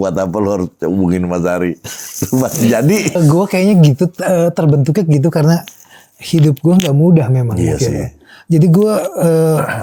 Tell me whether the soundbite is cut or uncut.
cut